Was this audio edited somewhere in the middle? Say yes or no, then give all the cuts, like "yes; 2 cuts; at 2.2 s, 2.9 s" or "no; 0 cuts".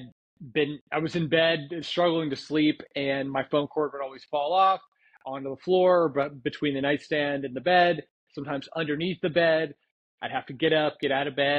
no; 0 cuts